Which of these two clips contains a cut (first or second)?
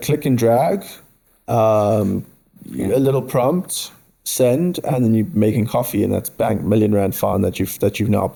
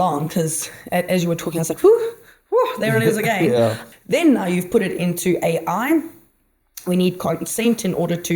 second